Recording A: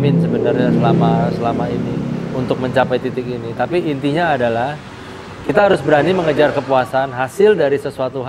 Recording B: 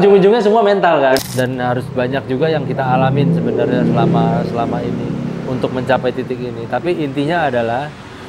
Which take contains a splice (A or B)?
B